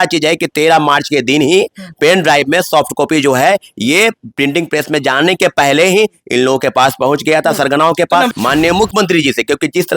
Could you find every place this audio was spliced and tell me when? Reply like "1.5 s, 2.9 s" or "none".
8.3 s